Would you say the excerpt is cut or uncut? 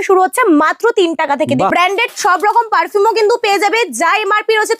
cut